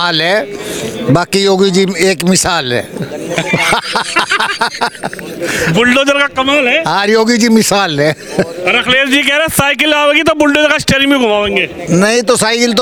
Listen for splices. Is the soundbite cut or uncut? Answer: uncut